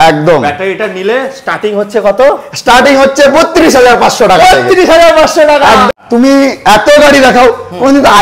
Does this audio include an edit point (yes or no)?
yes